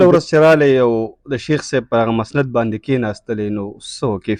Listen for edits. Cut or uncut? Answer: uncut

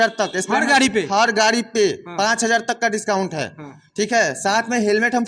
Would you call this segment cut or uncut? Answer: uncut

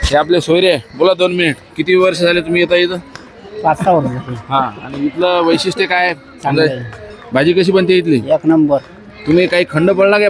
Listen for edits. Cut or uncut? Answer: uncut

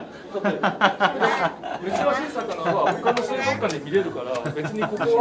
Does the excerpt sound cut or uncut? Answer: uncut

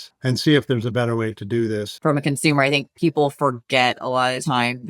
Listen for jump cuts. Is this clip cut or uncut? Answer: cut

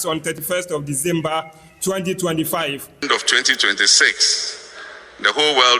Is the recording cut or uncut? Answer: cut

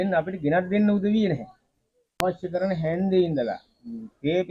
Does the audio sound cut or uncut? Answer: cut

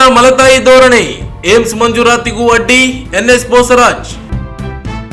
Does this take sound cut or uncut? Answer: uncut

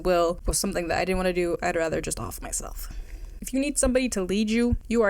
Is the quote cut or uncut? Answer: cut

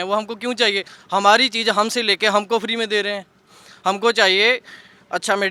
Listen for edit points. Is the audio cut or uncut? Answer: uncut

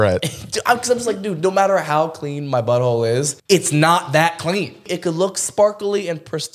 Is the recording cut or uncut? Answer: cut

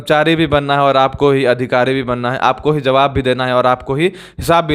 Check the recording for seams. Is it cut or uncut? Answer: uncut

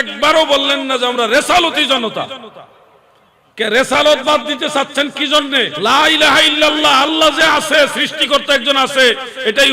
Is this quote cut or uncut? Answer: cut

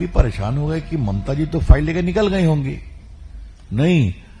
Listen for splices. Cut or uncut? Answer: uncut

